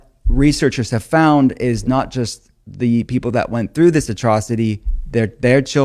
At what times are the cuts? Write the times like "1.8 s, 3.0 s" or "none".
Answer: none